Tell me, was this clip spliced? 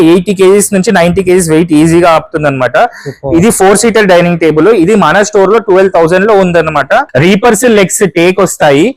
yes; 1 cut; at 7.1 s

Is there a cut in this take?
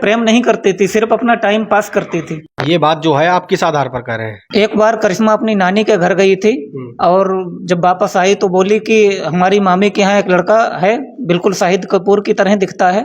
no; 0 cuts

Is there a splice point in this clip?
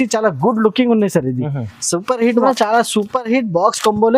yes; 1 cut; at 2.4 s

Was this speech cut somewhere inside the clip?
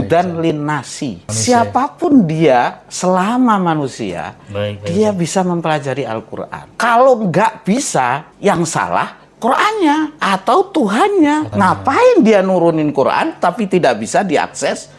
yes; 5 cuts; at 1.3 s, 6.6 s, 8.3 s, 10.2 s, 11.5 s

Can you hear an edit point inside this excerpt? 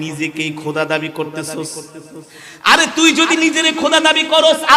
no; 0 cuts

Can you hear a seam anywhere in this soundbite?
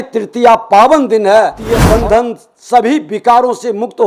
yes; 1 cut; at 1.7 s

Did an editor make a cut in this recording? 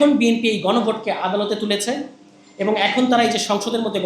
no; 0 cuts

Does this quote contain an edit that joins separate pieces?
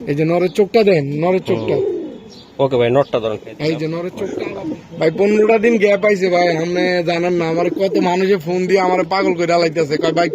yes; 1 cut; at 4.5 s

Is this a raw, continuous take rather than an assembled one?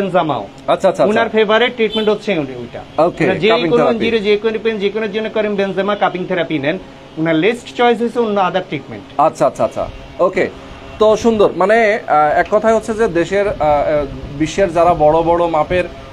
yes; 0 cuts

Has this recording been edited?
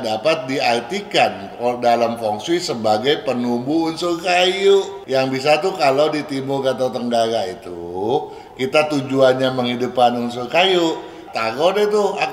yes; 2 cuts; at 5.0 s, 11.2 s

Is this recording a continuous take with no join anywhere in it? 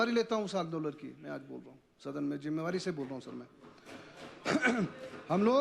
yes; 0 cuts

